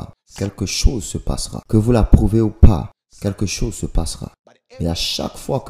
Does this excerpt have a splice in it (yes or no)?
yes